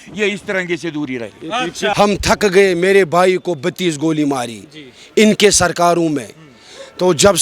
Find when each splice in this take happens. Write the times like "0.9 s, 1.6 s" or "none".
1.9 s